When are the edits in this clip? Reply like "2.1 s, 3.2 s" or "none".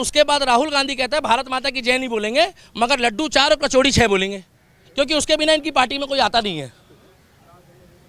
none